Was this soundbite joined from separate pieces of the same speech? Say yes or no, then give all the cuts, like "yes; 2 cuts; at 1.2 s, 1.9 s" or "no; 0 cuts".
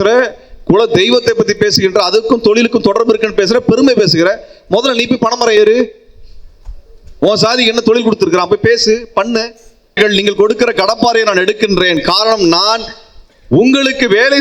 yes; 1 cut; at 10.0 s